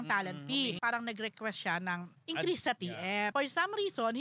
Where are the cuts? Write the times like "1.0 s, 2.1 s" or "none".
0.8 s, 2.1 s, 3.3 s